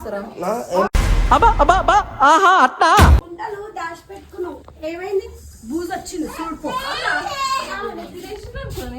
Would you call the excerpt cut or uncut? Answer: cut